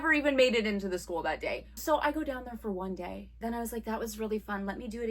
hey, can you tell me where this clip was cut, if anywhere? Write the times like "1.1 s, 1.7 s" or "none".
1.7 s, 3.3 s